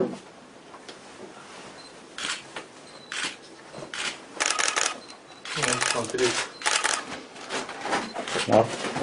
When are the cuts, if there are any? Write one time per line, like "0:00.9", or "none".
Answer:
none